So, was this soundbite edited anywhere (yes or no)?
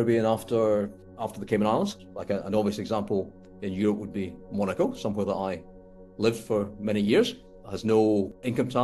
yes